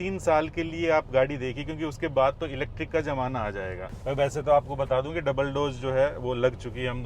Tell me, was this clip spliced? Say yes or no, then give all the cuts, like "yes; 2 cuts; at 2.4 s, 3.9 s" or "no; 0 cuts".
yes; 1 cut; at 3.9 s